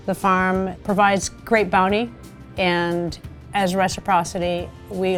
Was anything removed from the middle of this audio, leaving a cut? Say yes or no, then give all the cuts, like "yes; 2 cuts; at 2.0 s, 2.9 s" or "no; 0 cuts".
no; 0 cuts